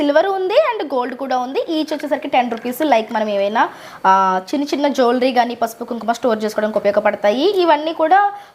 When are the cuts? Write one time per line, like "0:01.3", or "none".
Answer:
none